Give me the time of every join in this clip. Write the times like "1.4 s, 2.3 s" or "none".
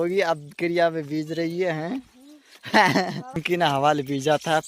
3.4 s